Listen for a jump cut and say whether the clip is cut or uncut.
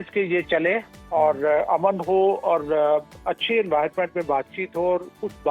uncut